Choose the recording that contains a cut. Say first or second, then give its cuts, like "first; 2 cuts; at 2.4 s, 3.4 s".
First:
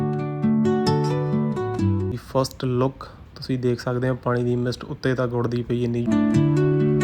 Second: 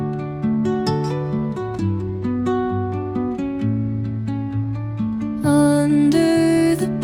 first; 2 cuts; at 2.1 s, 6.1 s